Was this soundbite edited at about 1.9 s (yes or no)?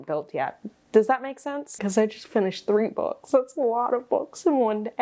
yes